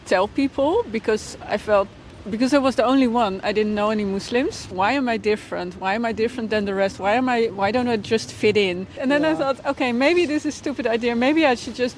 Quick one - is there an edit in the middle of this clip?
yes; 2 cuts; at 4.6 s, 8.9 s

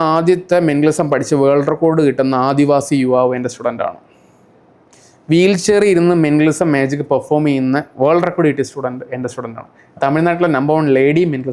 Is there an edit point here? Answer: no; 0 cuts

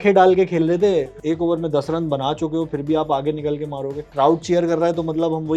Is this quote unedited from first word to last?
no; 2 cuts; at 1.2 s, 4.0 s

